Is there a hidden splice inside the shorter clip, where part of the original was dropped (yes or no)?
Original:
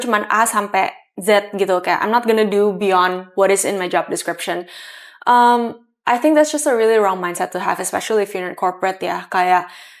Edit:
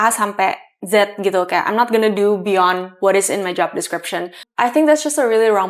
yes